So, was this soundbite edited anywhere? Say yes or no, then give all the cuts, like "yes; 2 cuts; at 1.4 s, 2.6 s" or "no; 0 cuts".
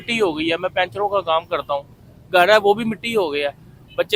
no; 0 cuts